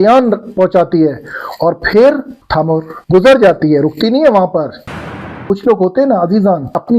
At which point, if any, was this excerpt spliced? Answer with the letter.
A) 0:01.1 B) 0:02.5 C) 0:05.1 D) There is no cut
C